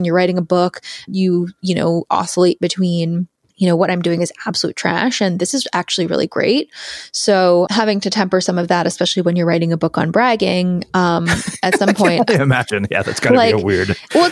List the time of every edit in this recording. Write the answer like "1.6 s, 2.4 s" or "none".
1.1 s, 3.4 s, 7.7 s